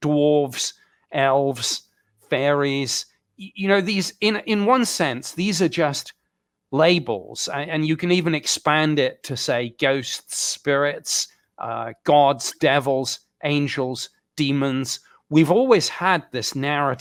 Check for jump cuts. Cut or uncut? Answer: uncut